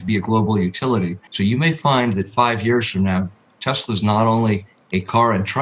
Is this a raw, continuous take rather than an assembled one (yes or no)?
no